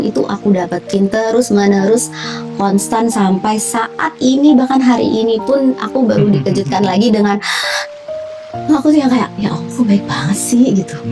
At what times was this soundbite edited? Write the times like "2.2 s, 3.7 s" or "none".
none

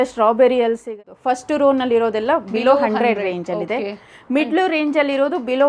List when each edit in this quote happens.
1.1 s

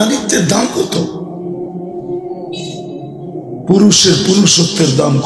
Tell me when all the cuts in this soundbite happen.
1.1 s, 3.6 s

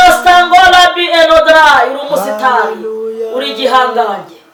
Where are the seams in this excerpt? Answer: none

